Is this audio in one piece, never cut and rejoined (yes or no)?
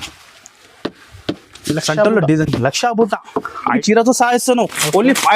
no